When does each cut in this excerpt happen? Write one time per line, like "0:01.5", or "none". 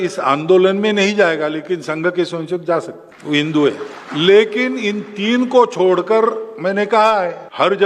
none